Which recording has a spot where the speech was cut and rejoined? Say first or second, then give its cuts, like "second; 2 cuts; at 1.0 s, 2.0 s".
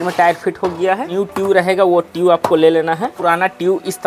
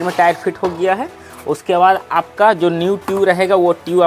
first; 2 cuts; at 1.1 s, 3.1 s